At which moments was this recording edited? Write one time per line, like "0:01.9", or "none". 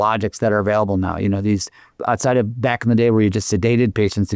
none